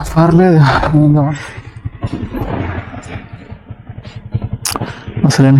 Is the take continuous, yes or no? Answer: no